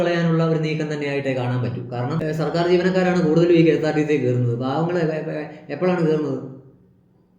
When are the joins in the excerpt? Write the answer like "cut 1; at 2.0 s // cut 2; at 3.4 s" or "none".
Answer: cut 1; at 2.2 s